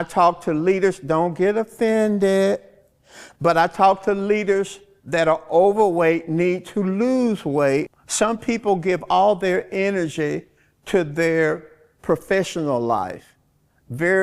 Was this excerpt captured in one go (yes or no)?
no